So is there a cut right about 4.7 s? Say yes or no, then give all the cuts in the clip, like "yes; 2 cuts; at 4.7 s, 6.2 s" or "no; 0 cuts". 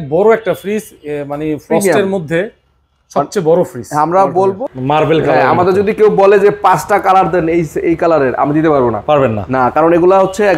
yes; 1 cut; at 4.7 s